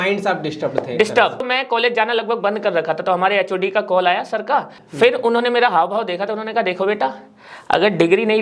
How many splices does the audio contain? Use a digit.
2